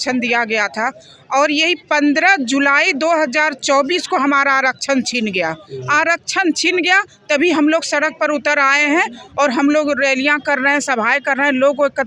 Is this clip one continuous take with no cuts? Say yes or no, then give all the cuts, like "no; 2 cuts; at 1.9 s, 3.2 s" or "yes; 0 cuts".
yes; 0 cuts